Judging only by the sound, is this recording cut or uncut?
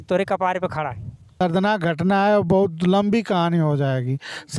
cut